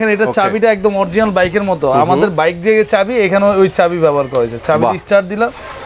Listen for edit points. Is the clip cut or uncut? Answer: uncut